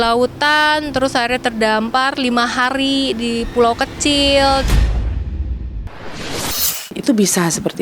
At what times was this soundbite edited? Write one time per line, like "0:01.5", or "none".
0:04.6